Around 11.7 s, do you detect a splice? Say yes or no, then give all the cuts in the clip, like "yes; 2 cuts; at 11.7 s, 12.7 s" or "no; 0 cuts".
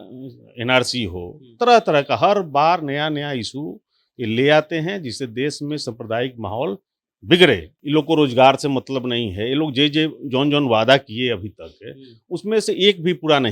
no; 1 cut; at 7.7 s